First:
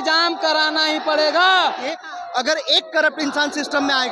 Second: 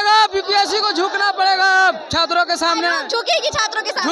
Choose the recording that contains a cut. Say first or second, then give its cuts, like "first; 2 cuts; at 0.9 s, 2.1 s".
first; 1 cut; at 1.8 s